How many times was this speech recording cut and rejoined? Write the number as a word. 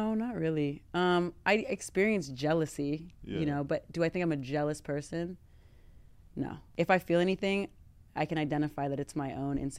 one